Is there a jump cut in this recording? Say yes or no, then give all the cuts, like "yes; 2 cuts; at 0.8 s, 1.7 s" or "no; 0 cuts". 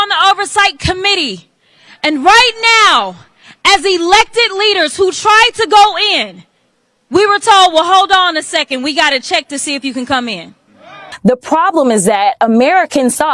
yes; 1 cut; at 11.1 s